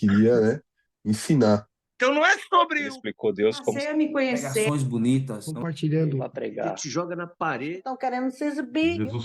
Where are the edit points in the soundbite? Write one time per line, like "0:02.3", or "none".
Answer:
0:01.8